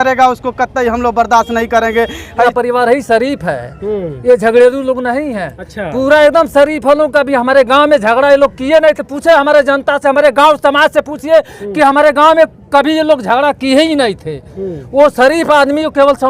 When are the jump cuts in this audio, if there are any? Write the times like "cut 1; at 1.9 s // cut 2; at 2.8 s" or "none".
cut 1; at 2.4 s